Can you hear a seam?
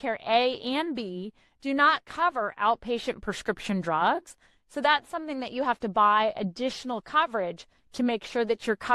no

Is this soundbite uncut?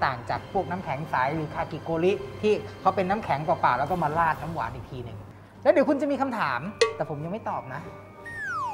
no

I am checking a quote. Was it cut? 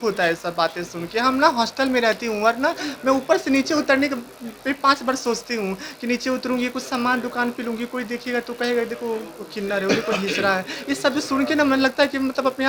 no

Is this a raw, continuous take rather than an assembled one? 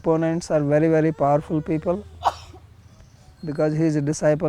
yes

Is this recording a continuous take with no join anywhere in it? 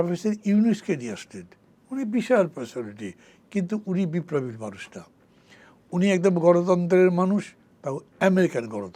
yes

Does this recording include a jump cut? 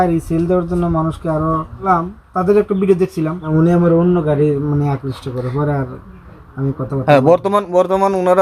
yes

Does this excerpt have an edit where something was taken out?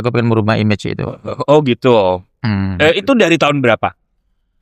no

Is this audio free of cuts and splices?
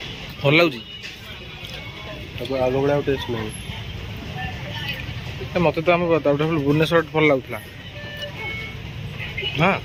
yes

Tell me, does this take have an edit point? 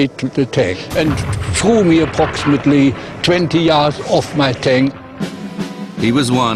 yes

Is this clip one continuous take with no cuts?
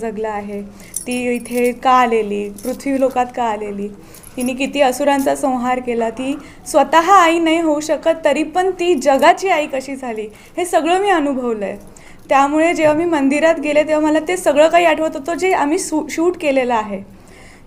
yes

